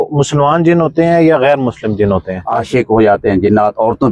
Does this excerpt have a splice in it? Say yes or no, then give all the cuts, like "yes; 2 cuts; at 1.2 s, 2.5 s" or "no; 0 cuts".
yes; 1 cut; at 2.4 s